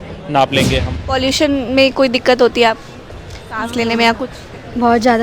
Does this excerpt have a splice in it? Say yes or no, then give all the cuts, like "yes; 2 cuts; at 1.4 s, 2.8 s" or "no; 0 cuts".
yes; 1 cut; at 1.0 s